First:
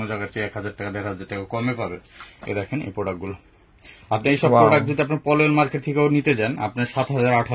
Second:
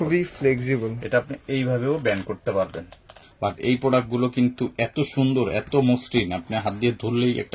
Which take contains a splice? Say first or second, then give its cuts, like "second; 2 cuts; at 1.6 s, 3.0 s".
second; 1 cut; at 3.2 s